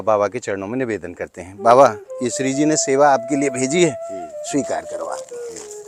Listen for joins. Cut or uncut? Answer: uncut